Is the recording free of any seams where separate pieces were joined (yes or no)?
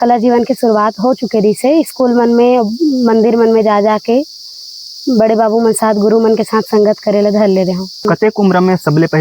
no